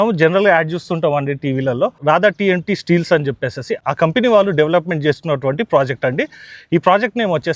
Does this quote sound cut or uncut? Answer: uncut